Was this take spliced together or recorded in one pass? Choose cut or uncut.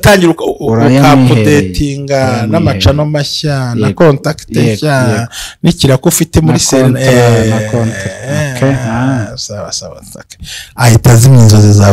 uncut